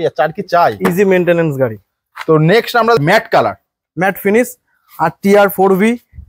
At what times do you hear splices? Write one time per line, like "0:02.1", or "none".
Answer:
0:03.0